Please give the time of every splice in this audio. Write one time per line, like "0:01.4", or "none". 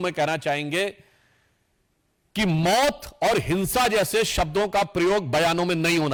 none

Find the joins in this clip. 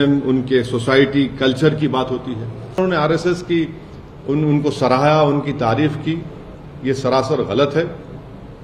0:02.8

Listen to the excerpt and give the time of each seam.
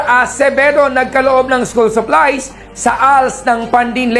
none

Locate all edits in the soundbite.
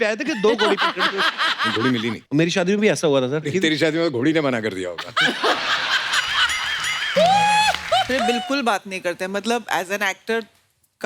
0:01.9
0:03.5
0:08.1

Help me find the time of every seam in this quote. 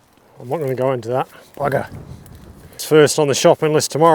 0:02.8

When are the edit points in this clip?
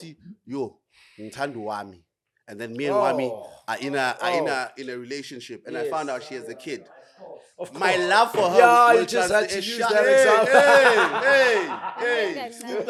none

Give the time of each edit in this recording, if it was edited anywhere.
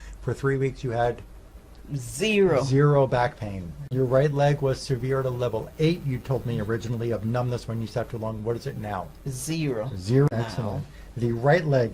0:03.9
0:10.3

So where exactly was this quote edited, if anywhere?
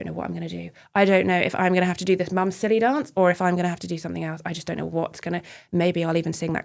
none

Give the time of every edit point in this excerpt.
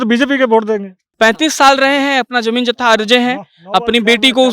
0:01.0

